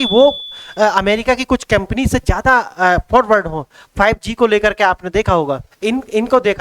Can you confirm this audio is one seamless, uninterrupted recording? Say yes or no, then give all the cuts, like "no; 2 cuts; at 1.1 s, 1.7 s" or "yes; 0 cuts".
no; 1 cut; at 5.7 s